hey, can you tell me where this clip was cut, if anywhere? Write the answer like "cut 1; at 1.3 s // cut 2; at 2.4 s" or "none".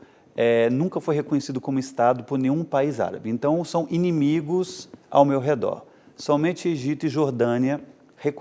none